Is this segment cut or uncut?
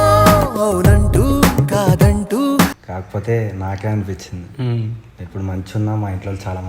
cut